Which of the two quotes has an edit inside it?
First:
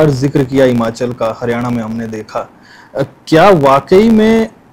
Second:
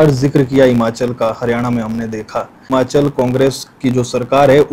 second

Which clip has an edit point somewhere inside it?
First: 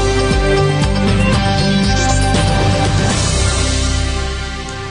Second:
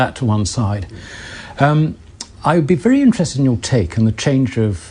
second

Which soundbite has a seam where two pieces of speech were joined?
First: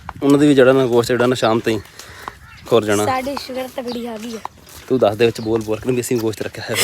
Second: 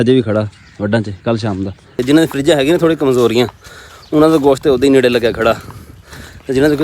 second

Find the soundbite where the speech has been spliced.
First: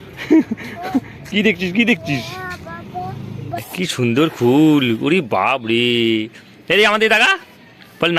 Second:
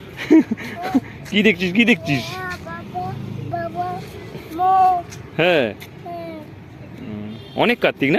first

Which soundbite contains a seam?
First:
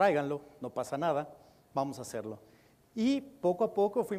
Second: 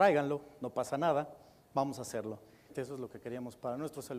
first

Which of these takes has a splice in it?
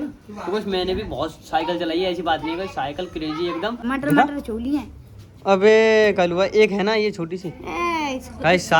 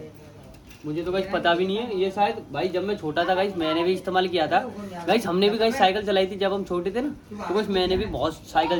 first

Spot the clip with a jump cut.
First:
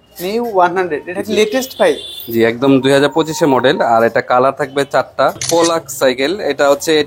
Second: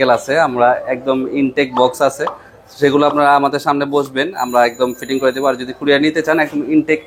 first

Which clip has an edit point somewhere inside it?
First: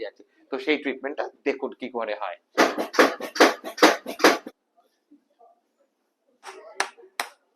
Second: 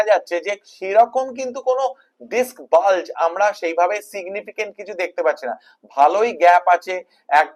first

